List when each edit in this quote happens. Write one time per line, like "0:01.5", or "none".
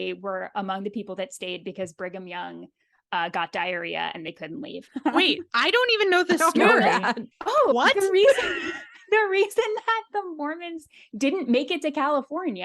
0:04.7
0:07.7